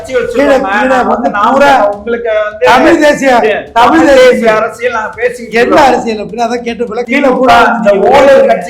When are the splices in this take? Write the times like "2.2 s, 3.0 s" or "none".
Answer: 7.0 s